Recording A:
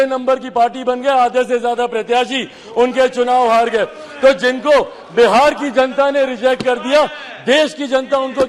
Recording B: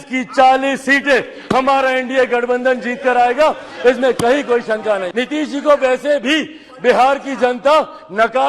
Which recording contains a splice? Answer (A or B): B